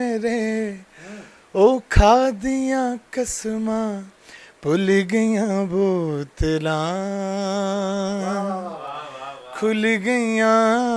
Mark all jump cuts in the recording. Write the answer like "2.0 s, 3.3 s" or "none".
none